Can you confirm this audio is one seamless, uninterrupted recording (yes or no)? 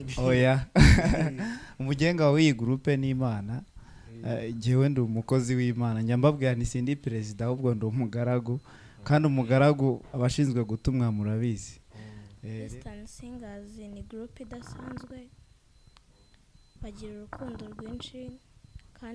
no